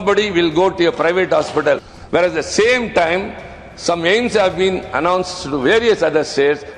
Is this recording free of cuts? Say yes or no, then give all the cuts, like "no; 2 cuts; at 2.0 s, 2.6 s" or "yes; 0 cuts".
no; 1 cut; at 1.9 s